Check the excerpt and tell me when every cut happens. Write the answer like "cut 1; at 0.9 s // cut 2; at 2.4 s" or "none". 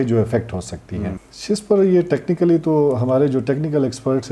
cut 1; at 1.3 s